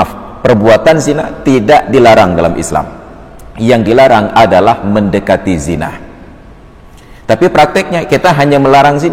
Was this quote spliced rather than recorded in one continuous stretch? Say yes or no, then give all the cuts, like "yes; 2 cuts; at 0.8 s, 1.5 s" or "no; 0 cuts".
no; 0 cuts